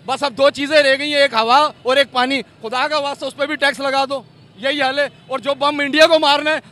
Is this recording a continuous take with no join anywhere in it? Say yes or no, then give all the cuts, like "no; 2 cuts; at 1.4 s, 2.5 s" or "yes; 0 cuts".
yes; 0 cuts